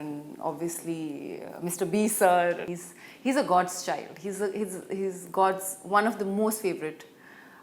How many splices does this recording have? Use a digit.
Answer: 1